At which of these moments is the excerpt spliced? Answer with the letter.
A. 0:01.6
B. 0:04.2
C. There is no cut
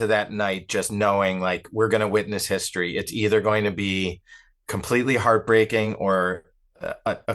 C